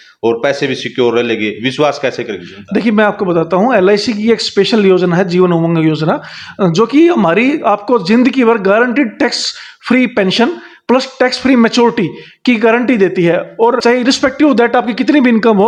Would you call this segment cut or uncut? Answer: uncut